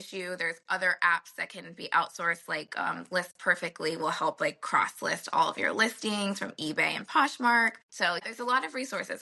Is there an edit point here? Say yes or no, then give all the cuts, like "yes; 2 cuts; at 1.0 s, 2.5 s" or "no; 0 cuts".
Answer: yes; 1 cut; at 8.2 s